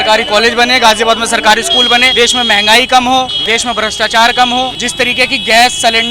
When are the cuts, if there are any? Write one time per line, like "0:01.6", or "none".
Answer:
0:02.1
0:03.4
0:04.8

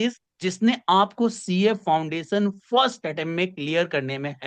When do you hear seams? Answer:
none

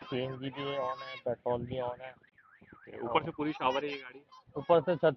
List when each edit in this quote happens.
none

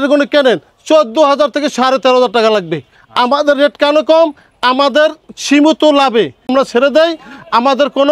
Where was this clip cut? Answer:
none

